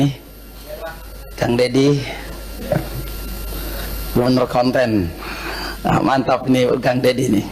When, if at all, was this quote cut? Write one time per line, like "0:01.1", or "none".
none